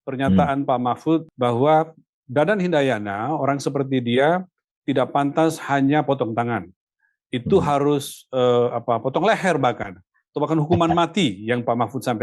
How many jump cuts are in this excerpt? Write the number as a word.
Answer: one